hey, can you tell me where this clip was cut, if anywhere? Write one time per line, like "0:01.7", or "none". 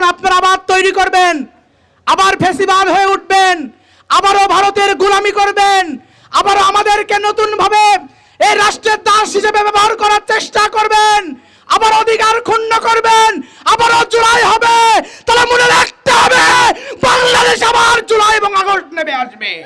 none